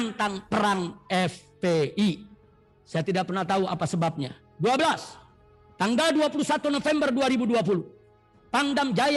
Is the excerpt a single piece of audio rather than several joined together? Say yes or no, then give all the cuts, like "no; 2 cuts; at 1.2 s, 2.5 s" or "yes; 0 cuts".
yes; 0 cuts